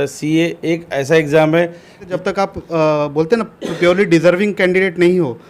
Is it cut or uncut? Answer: cut